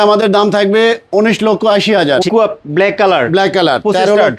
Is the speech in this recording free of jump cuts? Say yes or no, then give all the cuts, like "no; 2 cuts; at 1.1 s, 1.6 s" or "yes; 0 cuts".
no; 1 cut; at 2.3 s